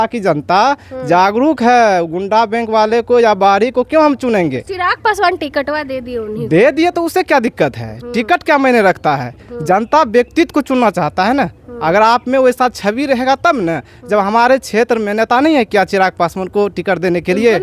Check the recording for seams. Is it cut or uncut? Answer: uncut